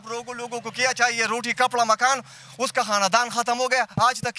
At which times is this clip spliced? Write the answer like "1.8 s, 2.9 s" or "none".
none